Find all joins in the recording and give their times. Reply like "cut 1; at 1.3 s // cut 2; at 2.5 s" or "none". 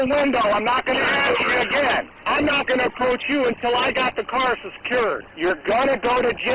cut 1; at 2.1 s // cut 2; at 5.3 s